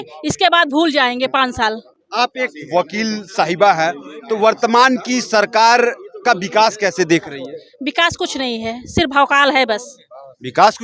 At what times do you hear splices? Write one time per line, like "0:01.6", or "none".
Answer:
none